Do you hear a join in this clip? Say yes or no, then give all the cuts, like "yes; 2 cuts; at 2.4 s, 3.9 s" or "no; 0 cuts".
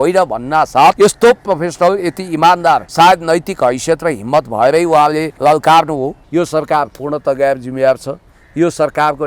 yes; 4 cuts; at 1.0 s, 2.9 s, 5.3 s, 6.2 s